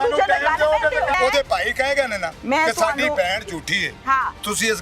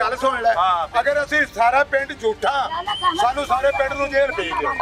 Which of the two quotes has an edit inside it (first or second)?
first